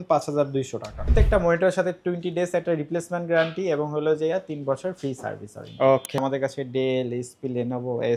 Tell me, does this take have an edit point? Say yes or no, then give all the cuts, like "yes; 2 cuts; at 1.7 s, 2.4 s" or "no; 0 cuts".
yes; 2 cuts; at 1.1 s, 6.2 s